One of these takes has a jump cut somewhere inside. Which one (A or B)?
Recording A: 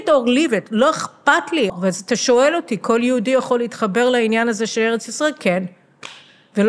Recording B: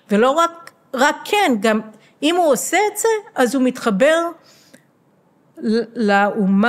A